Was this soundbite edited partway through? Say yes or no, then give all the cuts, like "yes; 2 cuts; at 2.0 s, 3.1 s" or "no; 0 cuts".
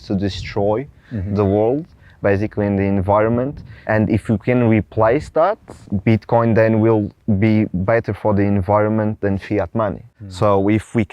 yes; 1 cut; at 10.1 s